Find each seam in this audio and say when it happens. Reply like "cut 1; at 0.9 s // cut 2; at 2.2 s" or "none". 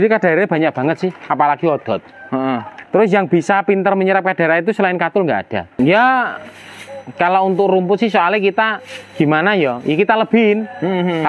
cut 1; at 5.7 s